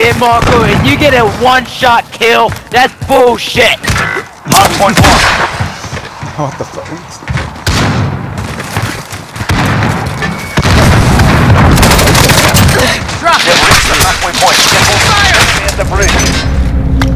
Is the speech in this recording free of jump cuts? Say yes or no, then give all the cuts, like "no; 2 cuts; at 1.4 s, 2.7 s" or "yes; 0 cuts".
yes; 0 cuts